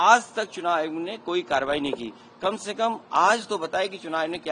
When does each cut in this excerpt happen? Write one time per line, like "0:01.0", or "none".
none